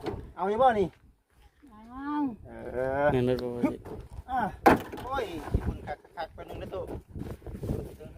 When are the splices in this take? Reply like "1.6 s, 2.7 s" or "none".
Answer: 5.1 s